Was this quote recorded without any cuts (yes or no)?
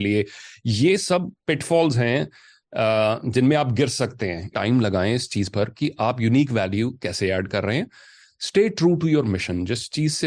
no